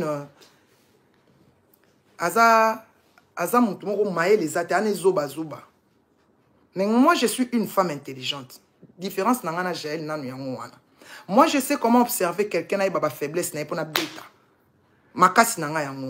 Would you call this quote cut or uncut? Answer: uncut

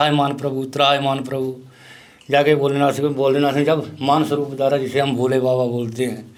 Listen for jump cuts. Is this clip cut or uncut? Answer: uncut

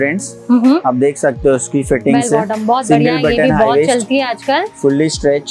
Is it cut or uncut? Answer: uncut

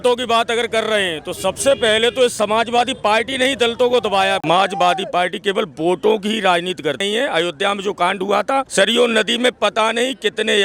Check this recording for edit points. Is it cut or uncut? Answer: cut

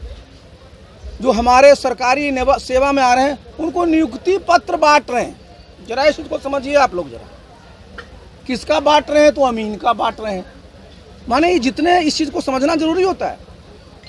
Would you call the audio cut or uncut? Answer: uncut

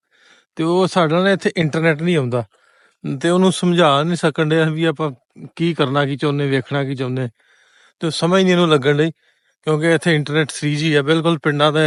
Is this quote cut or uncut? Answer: uncut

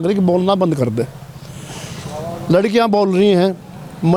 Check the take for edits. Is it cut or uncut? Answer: uncut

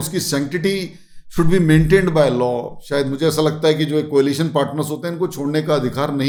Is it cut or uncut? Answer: uncut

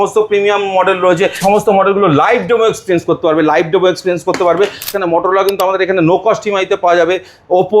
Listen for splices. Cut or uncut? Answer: cut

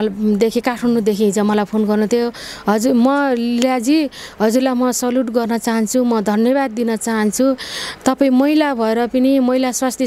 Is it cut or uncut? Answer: uncut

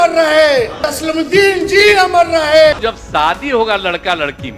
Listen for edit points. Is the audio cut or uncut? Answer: cut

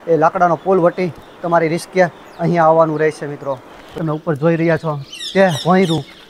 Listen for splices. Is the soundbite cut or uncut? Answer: cut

